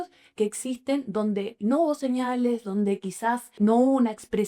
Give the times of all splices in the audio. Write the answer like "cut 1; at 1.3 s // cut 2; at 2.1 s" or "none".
cut 1; at 3.5 s